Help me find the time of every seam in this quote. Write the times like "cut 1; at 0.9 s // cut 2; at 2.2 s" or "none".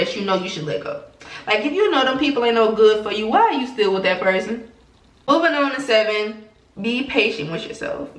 none